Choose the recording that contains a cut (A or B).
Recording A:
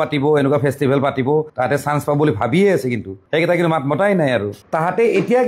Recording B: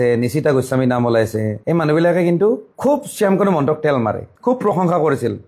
A